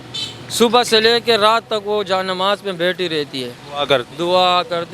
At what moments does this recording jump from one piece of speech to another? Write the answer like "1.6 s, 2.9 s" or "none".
none